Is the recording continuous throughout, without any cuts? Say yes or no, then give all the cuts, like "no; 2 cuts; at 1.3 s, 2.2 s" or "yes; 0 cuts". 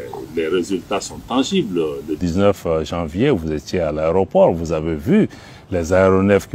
yes; 0 cuts